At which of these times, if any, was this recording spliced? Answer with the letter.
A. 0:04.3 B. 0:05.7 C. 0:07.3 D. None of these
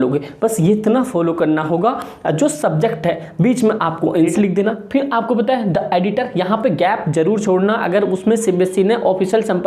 A